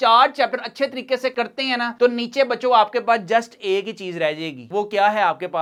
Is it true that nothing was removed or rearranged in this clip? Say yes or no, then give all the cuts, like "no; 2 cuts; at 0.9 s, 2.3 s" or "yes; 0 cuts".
yes; 0 cuts